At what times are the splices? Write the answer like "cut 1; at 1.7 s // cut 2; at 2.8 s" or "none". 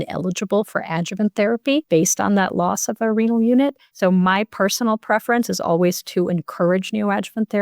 cut 1; at 1.9 s

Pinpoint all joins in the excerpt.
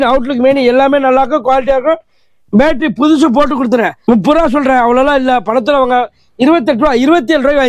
cut 1; at 3.9 s

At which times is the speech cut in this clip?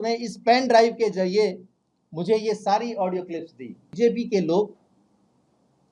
cut 1; at 3.8 s

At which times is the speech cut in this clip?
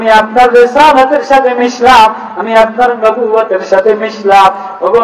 none

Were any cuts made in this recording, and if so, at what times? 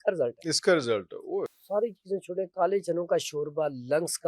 cut 1; at 1.5 s

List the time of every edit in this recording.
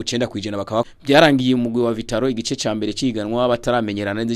cut 1; at 0.9 s

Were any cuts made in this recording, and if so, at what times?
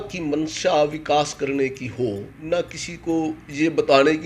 cut 1; at 2.3 s

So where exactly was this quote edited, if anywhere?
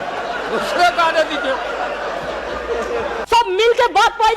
cut 1; at 3.2 s

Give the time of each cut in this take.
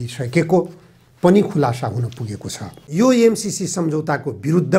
cut 1; at 2.8 s

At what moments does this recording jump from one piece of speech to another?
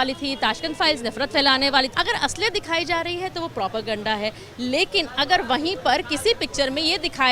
cut 1; at 1.9 s

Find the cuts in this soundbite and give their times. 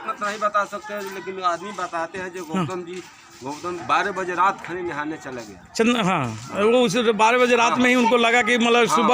cut 1; at 3.8 s

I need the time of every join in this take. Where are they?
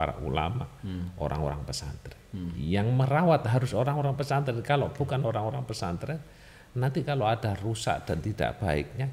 none

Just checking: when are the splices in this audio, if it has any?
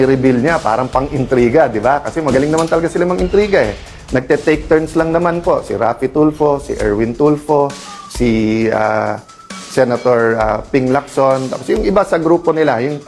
none

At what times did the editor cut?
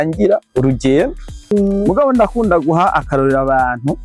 cut 1; at 1.4 s

